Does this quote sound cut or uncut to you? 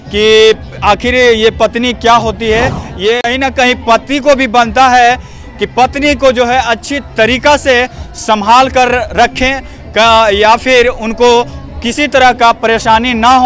cut